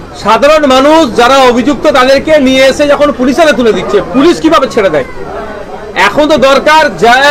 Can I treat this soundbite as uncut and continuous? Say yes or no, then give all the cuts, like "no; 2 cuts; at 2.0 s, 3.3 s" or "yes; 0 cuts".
yes; 0 cuts